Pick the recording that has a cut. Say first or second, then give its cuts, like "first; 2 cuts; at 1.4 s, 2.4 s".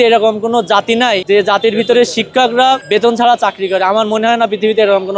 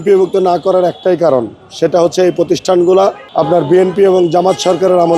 first; 2 cuts; at 1.2 s, 2.8 s